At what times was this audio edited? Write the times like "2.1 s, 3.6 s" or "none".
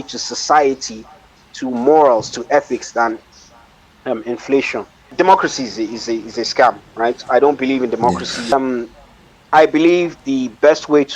5.1 s, 8.5 s